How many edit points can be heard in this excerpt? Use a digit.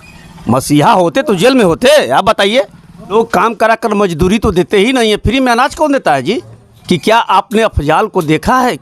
2